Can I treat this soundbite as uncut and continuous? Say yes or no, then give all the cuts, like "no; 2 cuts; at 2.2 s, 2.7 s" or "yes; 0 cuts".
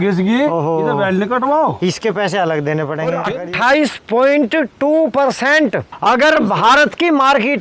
no; 1 cut; at 3.2 s